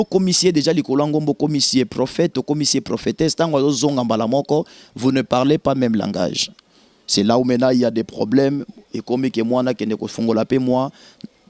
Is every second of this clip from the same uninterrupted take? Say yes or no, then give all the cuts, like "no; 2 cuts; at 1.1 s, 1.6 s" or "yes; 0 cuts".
yes; 0 cuts